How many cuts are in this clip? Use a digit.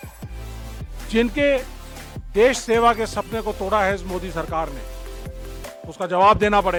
0